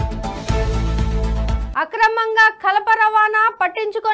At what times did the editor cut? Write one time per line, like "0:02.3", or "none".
0:01.6